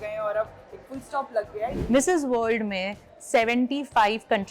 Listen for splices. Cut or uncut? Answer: cut